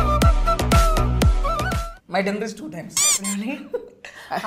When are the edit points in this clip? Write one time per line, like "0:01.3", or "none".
0:01.9